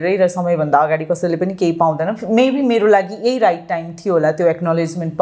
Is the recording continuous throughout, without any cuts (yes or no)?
yes